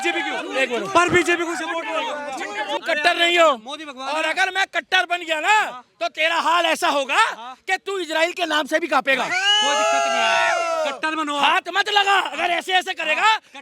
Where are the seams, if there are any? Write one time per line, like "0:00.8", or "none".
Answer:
0:02.8